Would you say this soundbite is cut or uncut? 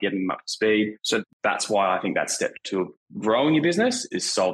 cut